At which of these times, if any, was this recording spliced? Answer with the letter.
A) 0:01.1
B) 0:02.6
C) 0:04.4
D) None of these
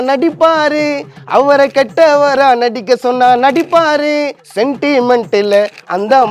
C